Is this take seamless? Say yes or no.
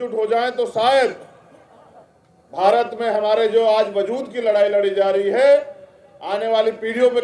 yes